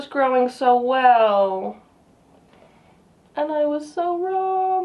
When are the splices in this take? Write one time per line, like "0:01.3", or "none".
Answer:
none